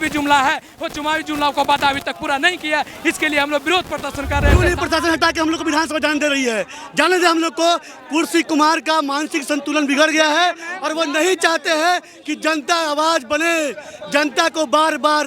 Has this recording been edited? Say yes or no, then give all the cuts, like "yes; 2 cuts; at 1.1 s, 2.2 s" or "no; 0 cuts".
yes; 1 cut; at 4.5 s